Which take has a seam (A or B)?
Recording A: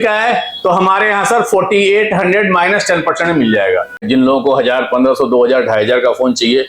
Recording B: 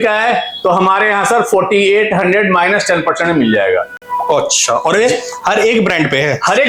A